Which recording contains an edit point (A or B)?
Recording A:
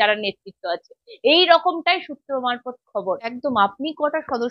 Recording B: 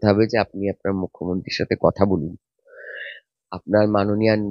A